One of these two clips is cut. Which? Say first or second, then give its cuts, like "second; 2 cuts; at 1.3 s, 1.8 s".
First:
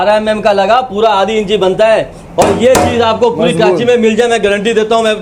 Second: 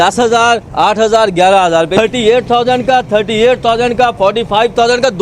second; 1 cut; at 1.9 s